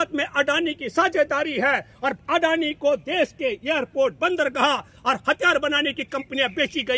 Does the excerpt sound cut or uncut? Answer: uncut